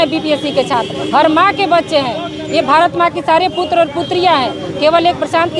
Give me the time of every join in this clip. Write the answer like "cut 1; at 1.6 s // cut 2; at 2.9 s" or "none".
none